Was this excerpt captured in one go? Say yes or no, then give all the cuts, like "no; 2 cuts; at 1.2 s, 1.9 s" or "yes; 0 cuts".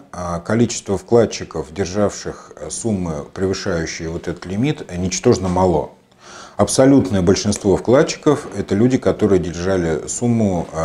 yes; 0 cuts